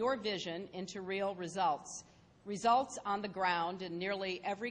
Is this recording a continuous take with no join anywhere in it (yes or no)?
no